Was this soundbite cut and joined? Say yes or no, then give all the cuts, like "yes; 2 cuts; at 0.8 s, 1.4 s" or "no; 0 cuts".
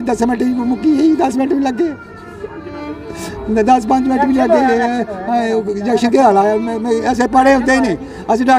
no; 0 cuts